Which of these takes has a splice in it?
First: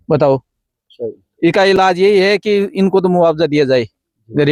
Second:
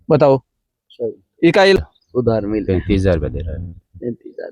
second; 1 cut; at 1.8 s

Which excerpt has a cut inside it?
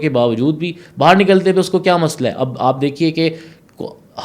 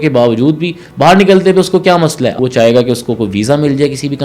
second; 1 cut; at 2.4 s

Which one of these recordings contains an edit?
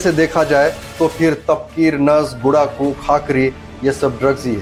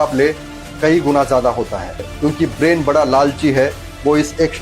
second; 1 cut; at 2.0 s

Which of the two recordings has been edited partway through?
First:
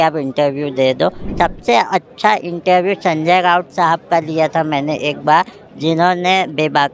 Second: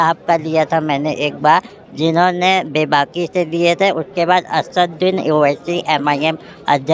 first; 1 cut; at 1.2 s

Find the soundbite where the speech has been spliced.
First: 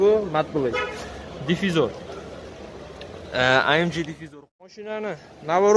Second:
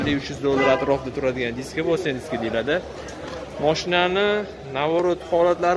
first; 1 cut; at 4.2 s

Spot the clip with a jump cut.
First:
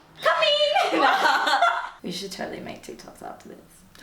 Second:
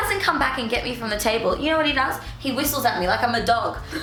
first; 1 cut; at 2.0 s

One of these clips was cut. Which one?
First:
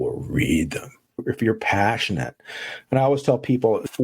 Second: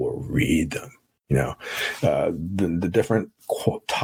first; 1 cut; at 1.2 s

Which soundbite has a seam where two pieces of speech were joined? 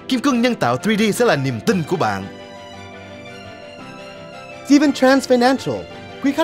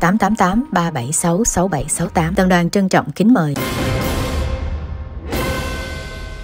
second; 1 cut; at 3.6 s

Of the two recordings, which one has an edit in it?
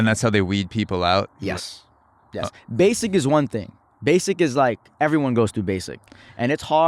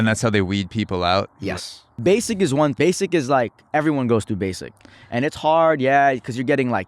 second; 2 cuts; at 1.8 s, 2.7 s

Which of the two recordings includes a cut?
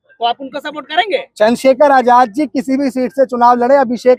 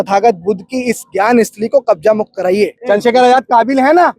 second; 1 cut; at 2.8 s

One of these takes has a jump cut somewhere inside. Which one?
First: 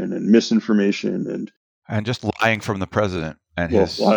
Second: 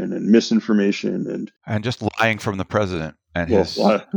second; 1 cut; at 1.5 s

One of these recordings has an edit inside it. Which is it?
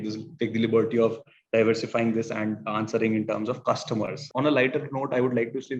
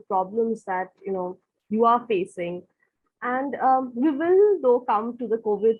first; 1 cut; at 4.2 s

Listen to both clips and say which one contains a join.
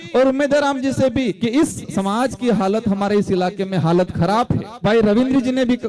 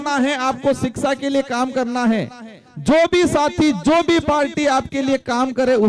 first; 2 cuts; at 1.4 s, 4.8 s

